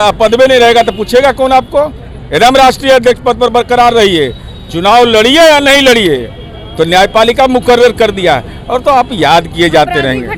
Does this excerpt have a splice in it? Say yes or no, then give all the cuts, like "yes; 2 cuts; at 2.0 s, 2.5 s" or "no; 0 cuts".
no; 0 cuts